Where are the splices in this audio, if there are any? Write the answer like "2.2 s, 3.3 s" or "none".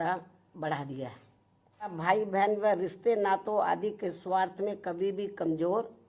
2.0 s